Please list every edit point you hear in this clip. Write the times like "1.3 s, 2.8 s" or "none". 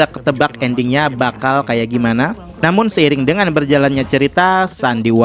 2.5 s